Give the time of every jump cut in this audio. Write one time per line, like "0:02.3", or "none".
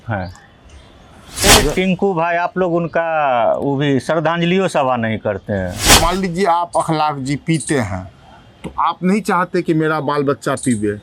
0:01.4
0:05.9